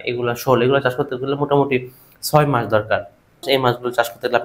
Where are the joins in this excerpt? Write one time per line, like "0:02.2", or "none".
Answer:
0:03.4